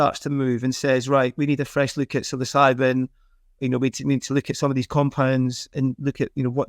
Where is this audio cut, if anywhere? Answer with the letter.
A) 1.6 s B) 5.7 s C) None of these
B